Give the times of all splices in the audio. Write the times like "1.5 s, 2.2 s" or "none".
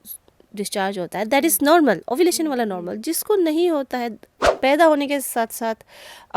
4.4 s